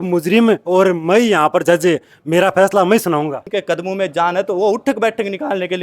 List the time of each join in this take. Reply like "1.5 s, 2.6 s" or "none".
3.5 s